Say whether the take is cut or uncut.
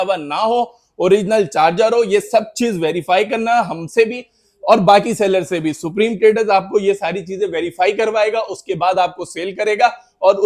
uncut